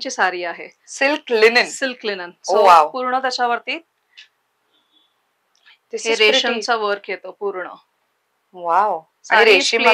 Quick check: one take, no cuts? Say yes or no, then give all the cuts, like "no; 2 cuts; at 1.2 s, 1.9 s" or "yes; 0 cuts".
yes; 0 cuts